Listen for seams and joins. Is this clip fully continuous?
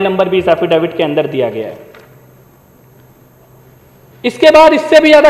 yes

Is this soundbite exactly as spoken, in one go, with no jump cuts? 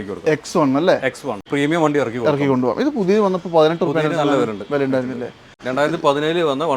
no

